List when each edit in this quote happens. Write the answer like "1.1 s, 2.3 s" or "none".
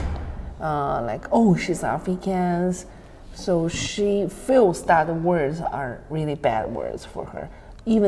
none